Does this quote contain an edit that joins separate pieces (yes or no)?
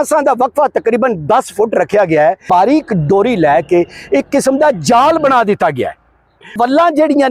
yes